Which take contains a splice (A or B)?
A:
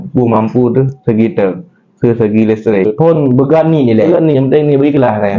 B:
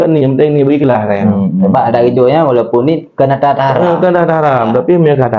A